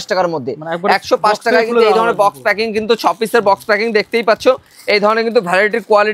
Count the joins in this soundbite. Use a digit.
0